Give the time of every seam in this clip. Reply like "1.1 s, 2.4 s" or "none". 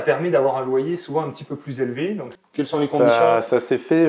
2.4 s